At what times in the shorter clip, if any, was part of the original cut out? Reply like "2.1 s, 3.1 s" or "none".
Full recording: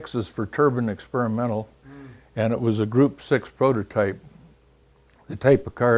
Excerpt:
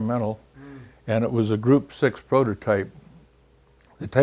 none